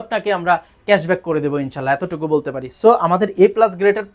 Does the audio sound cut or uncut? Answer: uncut